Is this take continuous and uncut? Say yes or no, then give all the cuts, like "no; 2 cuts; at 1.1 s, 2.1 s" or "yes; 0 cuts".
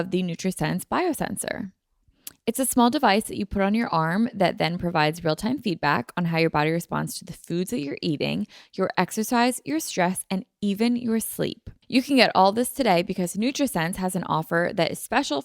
no; 1 cut; at 11.7 s